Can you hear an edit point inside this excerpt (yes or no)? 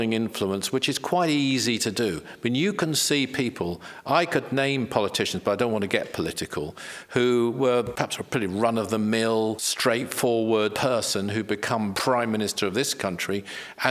yes